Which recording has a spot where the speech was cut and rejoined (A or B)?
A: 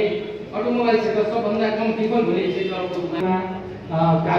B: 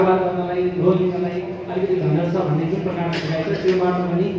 A